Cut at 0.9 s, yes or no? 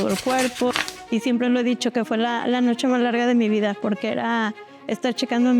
yes